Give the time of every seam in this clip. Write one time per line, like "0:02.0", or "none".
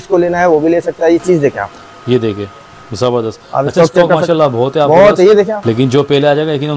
none